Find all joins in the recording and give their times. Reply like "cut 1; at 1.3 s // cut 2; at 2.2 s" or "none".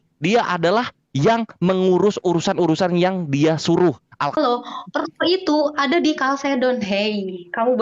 cut 1; at 4.4 s